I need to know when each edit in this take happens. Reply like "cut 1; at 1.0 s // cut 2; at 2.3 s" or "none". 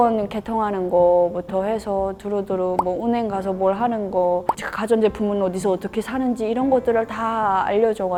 none